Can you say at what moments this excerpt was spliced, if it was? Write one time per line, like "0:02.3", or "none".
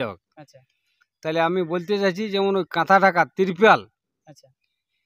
none